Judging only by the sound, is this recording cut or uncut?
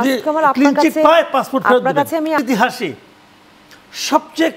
cut